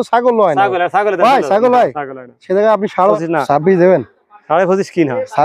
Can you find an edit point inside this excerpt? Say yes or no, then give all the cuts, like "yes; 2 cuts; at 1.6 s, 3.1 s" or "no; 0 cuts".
yes; 1 cut; at 3.1 s